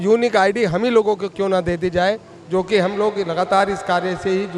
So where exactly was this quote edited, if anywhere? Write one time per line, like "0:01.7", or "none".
none